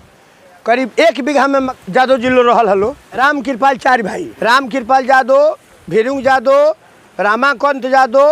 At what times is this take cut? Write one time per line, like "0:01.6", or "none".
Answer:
0:01.8
0:03.1
0:04.3